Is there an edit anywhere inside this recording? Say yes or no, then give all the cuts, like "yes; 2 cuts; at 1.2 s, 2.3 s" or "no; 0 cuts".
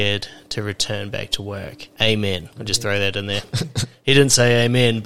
yes; 2 cuts; at 1.8 s, 2.6 s